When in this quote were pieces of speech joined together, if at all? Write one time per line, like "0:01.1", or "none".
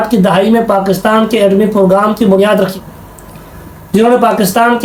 none